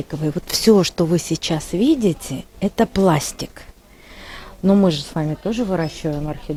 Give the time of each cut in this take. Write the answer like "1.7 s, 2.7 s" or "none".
none

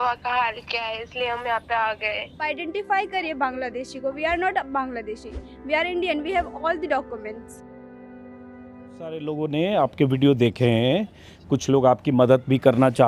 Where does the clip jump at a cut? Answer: 2.4 s, 9.3 s

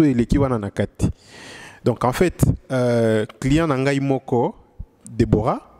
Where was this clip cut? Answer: none

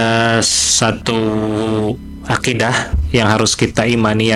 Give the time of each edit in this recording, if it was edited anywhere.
none

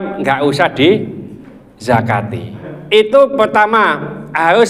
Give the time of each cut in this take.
2.7 s

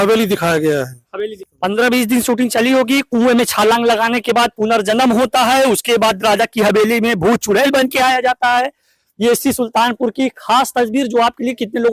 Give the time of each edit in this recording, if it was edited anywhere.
none

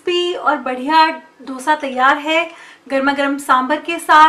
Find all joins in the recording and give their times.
none

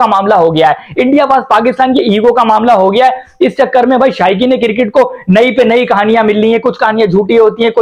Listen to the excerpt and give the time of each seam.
none

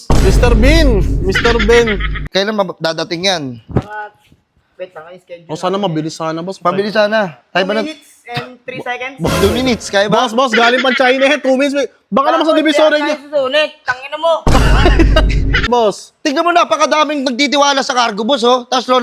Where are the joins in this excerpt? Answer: 2.2 s, 15.7 s

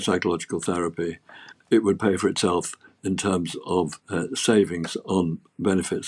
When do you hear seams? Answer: 1.6 s, 4.0 s

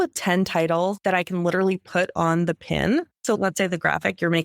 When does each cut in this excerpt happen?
1.0 s, 3.1 s

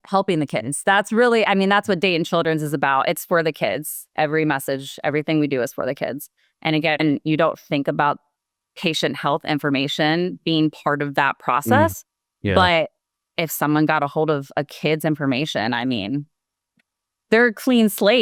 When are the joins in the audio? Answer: none

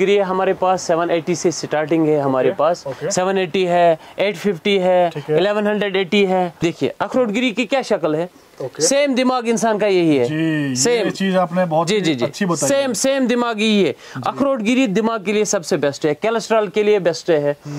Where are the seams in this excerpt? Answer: 6.6 s

